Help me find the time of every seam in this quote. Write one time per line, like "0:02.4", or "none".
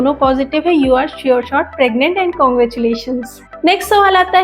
0:03.4